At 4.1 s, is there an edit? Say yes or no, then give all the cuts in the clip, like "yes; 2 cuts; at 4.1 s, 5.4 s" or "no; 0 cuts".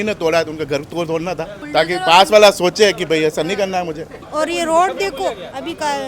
yes; 1 cut; at 4.1 s